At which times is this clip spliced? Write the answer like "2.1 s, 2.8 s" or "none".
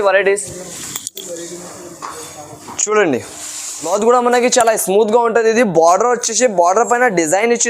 3.8 s